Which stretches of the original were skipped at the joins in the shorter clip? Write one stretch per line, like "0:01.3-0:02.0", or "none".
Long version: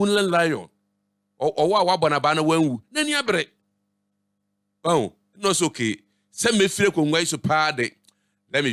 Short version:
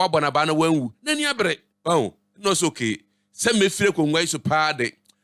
0:03.6-0:04.7